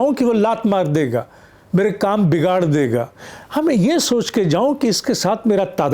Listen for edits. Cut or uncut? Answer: uncut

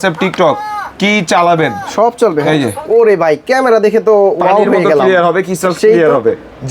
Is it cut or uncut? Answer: cut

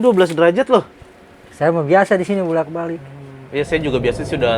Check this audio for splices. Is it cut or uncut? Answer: uncut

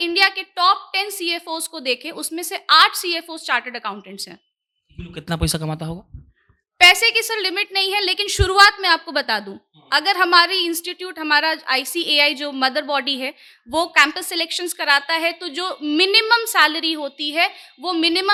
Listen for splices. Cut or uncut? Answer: uncut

